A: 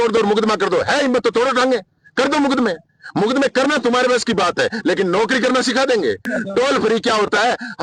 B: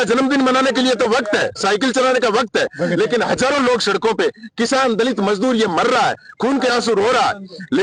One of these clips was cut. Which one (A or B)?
A